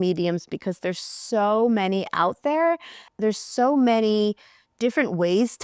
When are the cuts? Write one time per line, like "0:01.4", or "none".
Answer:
0:03.0